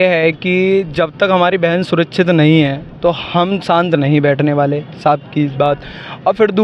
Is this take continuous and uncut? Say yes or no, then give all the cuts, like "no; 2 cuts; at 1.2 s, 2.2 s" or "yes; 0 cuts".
yes; 0 cuts